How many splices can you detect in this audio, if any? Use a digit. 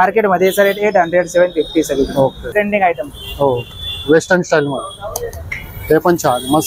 0